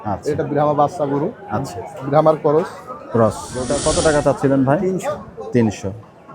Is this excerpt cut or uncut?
cut